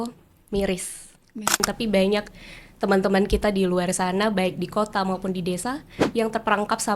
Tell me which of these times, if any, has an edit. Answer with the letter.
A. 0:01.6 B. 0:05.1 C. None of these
A